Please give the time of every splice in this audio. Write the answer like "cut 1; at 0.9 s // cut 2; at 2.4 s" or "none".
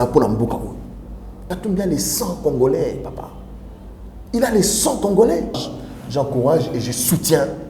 cut 1; at 1.3 s // cut 2; at 5.7 s